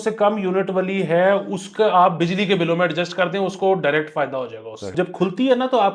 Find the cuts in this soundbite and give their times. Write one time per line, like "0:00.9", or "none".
0:04.9